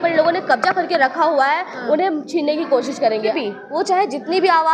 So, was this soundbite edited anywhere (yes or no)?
yes